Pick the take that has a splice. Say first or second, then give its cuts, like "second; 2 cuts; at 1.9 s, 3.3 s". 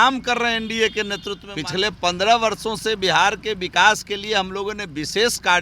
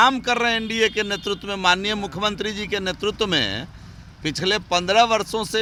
first; 1 cut; at 1.4 s